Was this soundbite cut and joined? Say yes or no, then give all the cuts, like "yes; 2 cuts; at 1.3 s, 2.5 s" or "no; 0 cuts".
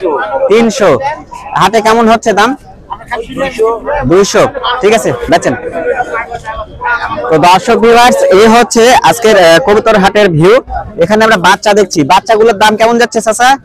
no; 0 cuts